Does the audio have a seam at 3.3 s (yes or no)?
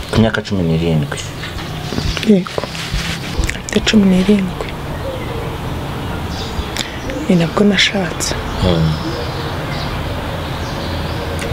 yes